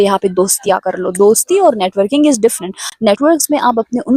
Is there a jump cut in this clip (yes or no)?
no